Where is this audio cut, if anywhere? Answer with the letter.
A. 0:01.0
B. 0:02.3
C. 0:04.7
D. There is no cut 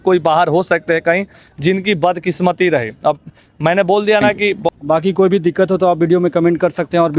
C